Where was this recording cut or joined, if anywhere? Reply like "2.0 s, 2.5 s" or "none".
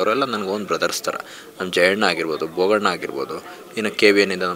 none